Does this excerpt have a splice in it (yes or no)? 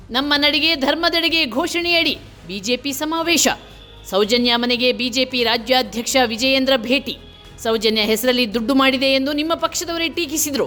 no